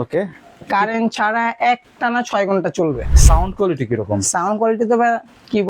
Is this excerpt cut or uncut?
cut